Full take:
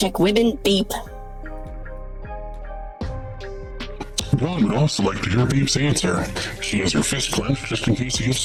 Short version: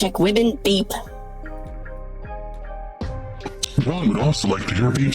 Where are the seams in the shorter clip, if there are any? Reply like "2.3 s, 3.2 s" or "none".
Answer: 3.6 s